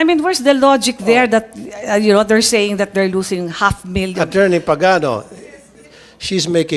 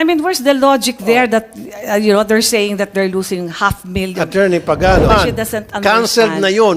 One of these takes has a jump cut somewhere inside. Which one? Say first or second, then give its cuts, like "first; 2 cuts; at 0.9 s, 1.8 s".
second; 1 cut; at 5.1 s